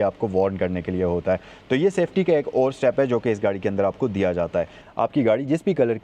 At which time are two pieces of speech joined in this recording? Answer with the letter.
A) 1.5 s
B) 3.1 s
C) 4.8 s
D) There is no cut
C